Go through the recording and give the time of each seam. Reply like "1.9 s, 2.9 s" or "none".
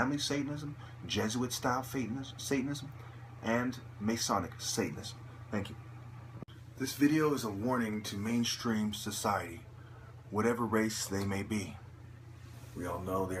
6.0 s